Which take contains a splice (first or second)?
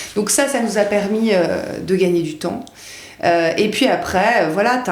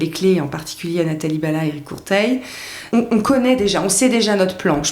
second